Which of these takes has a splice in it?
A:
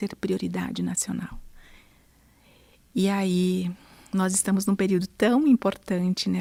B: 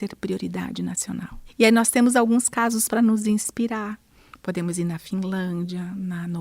B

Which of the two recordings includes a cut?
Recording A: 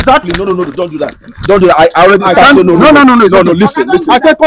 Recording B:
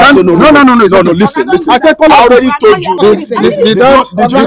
B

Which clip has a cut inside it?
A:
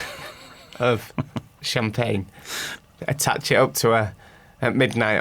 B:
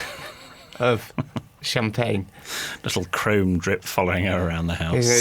A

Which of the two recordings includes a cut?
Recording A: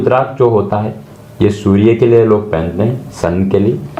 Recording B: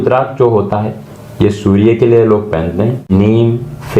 B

